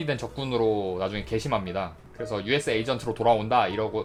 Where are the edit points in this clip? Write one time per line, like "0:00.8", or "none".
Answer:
none